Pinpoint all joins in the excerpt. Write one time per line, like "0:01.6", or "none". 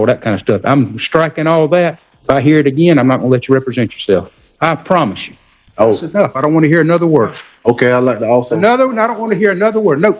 0:02.1
0:04.4
0:05.5